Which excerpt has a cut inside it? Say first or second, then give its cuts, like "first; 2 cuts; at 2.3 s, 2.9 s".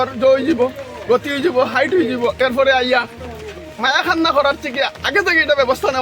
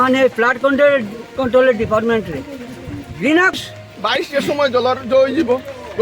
second; 1 cut; at 3.6 s